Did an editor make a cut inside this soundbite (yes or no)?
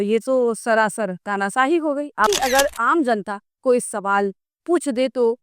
yes